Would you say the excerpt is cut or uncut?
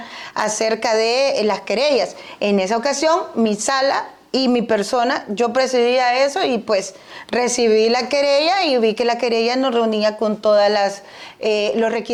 uncut